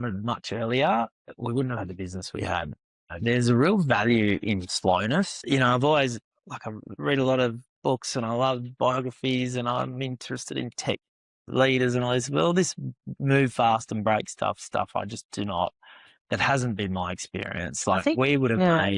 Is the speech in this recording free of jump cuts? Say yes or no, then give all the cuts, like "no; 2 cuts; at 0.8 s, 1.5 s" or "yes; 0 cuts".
yes; 0 cuts